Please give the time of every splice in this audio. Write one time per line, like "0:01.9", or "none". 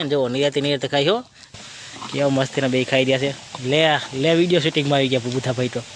0:01.6